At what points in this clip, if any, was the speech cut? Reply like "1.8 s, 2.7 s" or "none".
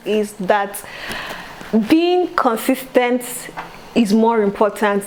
none